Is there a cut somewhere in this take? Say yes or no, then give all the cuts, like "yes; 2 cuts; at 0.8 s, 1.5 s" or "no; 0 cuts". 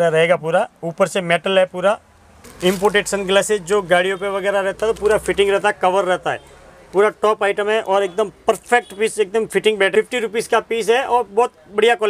yes; 2 cuts; at 2.5 s, 9.9 s